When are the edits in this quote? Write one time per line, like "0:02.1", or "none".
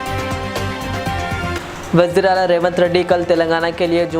0:01.5